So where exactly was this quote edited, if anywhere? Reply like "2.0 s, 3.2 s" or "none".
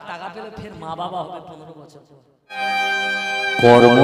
2.5 s